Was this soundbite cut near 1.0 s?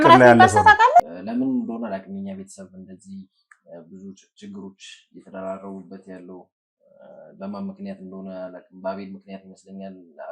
yes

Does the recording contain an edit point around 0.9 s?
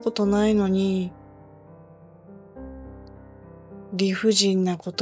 no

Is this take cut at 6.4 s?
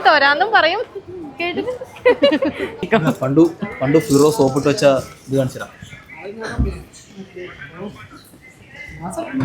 no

